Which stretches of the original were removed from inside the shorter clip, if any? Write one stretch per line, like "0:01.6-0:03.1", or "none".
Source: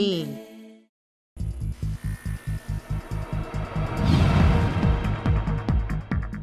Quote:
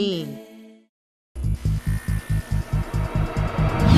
0:01.4-0:01.5